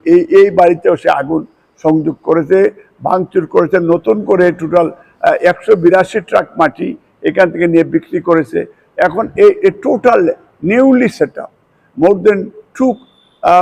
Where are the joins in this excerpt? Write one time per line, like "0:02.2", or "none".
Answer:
none